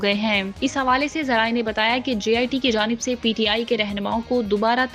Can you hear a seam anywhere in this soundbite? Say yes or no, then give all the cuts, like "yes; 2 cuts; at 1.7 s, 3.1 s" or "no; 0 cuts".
no; 0 cuts